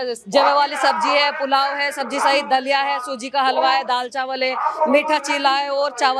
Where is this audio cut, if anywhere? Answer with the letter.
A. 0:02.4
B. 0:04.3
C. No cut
C